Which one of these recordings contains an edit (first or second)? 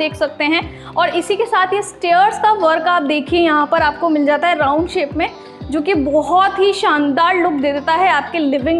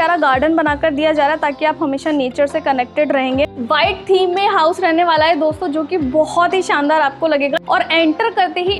second